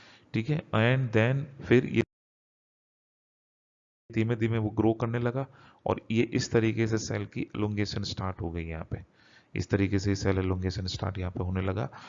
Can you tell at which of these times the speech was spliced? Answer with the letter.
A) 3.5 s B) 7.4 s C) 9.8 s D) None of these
D